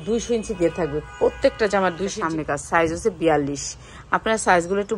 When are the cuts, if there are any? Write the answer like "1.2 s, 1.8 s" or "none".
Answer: 2.2 s